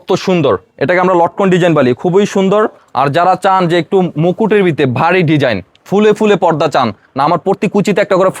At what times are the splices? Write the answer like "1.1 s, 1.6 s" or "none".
2.8 s